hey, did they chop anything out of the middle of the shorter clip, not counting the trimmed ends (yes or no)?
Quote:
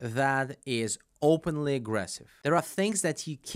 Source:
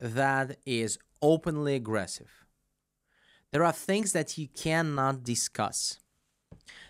yes